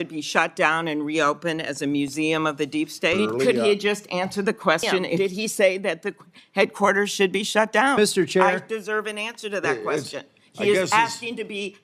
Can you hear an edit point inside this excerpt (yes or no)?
yes